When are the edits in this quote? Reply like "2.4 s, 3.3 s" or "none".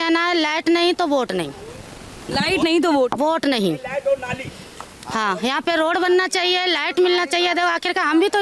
none